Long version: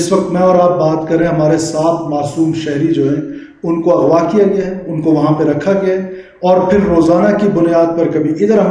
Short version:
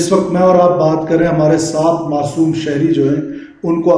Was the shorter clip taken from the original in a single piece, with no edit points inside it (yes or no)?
yes